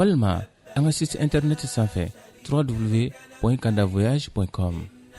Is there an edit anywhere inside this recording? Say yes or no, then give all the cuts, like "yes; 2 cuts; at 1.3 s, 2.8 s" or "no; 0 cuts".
no; 0 cuts